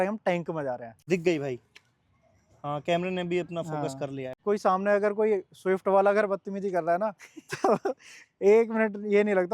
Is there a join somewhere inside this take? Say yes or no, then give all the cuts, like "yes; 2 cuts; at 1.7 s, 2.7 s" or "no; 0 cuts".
yes; 2 cuts; at 1.0 s, 4.4 s